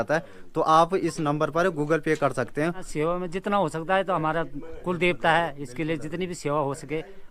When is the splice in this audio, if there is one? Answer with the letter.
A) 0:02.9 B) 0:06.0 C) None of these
A